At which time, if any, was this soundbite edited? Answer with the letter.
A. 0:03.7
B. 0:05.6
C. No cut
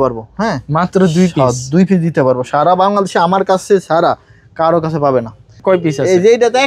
B